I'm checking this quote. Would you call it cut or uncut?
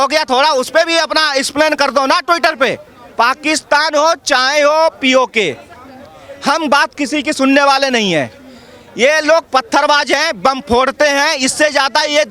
uncut